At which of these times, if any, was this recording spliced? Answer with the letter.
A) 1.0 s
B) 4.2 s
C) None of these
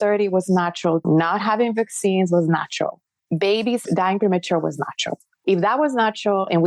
A